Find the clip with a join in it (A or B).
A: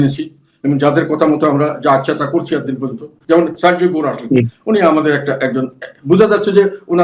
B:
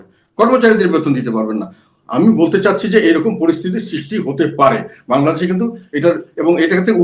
A